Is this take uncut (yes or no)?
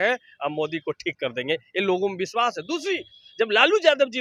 yes